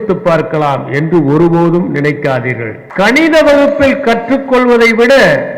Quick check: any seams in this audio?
yes; 1 cut; at 2.8 s

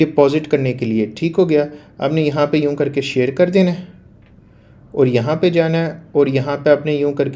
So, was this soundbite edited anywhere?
no; 0 cuts

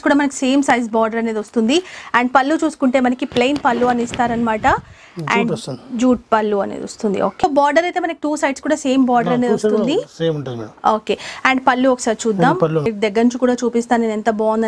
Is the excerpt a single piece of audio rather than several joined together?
no; 2 cuts; at 7.4 s, 12.9 s

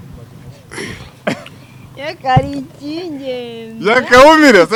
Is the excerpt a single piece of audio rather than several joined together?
yes; 0 cuts

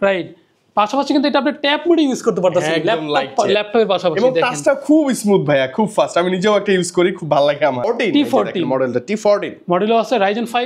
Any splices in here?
yes; 1 cut; at 7.9 s

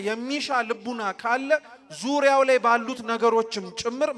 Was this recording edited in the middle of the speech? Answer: no; 0 cuts

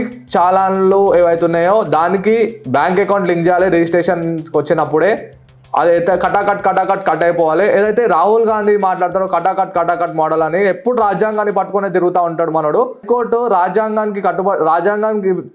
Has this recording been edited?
yes; 1 cut; at 13.0 s

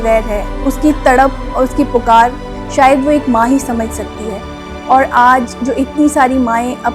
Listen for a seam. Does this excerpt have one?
no; 0 cuts

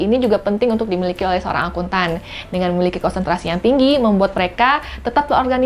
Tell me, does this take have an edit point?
no; 0 cuts

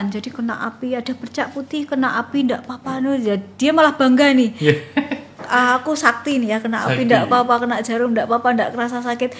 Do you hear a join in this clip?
no; 0 cuts

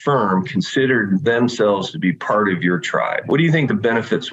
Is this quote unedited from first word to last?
no; 1 cut; at 3.3 s

